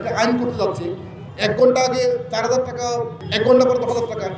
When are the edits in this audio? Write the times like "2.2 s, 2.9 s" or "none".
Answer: 1.2 s, 3.2 s